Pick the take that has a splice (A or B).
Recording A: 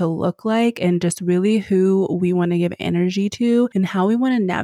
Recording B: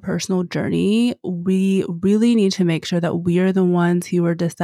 A